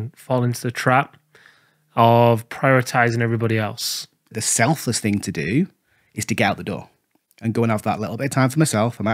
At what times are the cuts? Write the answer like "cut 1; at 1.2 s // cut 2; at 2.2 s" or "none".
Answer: cut 1; at 4.3 s